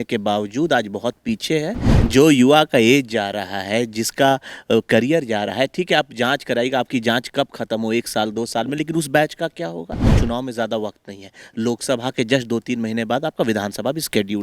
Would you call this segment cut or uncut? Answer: cut